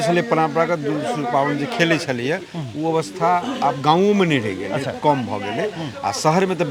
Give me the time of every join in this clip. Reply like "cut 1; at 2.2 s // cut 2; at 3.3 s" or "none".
none

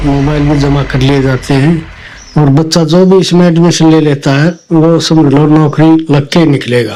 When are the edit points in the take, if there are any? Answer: none

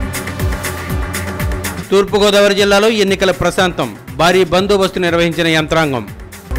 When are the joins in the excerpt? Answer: cut 1; at 1.6 s

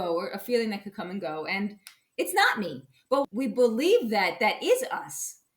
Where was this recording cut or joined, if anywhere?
cut 1; at 3.3 s

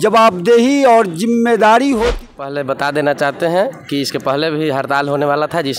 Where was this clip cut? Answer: cut 1; at 2.2 s

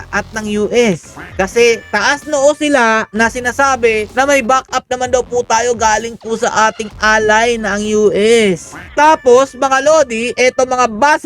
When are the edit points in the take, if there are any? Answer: cut 1; at 1.2 s // cut 2; at 3.1 s // cut 3; at 4.1 s // cut 4; at 8.8 s

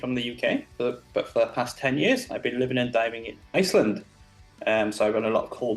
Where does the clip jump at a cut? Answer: none

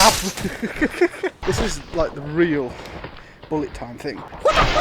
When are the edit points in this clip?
cut 1; at 1.4 s

